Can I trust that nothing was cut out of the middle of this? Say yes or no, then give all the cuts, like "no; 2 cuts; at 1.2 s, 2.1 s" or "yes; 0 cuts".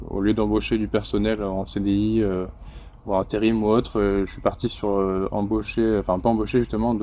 yes; 0 cuts